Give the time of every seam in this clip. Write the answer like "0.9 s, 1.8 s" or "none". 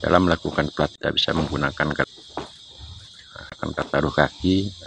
0.9 s, 2.0 s, 3.6 s